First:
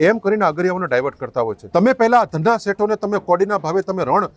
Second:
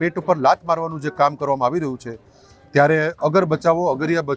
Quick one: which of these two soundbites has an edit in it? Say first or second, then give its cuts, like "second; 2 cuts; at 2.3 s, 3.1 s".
first; 1 cut; at 1.6 s